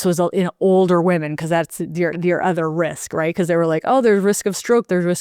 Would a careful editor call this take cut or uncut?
uncut